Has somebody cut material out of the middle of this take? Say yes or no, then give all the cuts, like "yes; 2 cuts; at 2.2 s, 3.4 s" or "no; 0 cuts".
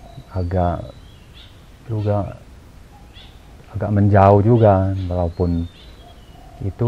no; 0 cuts